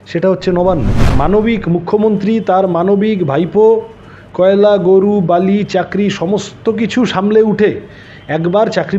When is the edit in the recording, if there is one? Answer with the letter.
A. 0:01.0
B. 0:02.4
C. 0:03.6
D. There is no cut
A